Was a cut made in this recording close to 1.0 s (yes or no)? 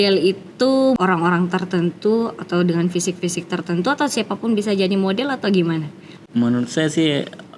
yes